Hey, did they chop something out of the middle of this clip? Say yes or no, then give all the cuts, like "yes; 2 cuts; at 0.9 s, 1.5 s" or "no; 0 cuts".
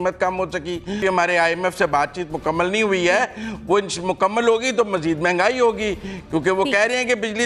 yes; 1 cut; at 1.0 s